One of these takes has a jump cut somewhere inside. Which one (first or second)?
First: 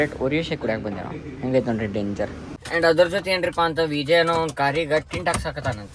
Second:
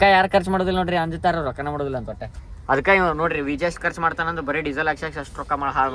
first